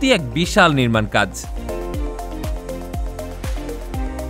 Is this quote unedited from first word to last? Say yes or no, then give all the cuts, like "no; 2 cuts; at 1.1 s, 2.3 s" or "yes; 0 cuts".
no; 2 cuts; at 1.4 s, 3.0 s